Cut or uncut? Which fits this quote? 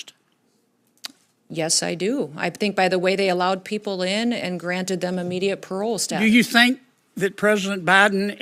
uncut